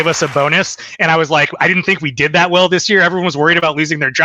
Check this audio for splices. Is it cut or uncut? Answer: uncut